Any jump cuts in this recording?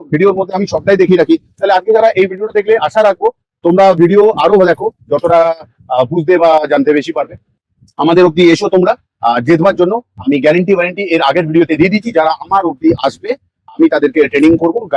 no; 0 cuts

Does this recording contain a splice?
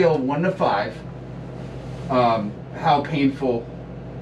no; 0 cuts

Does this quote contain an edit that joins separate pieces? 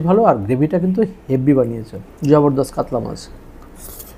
no; 0 cuts

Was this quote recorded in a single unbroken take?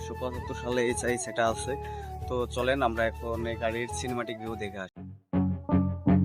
yes; 0 cuts

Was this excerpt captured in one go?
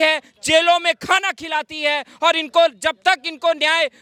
yes; 0 cuts

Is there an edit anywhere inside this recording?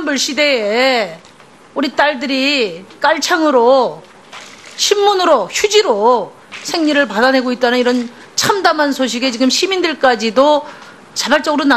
yes; 1 cut; at 3.6 s

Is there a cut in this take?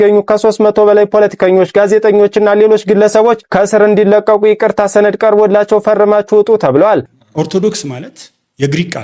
yes; 1 cut; at 7.0 s

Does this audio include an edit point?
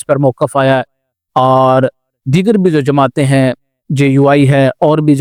no; 0 cuts

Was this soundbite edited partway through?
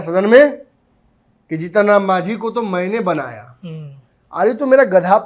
no; 0 cuts

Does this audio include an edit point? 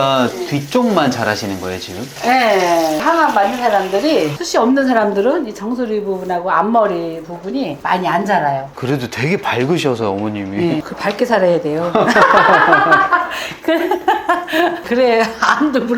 yes; 3 cuts; at 3.0 s, 4.4 s, 8.7 s

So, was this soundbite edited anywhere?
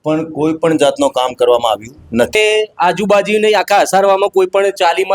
yes; 1 cut; at 2.3 s

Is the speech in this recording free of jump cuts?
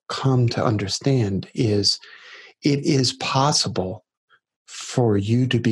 yes; 0 cuts

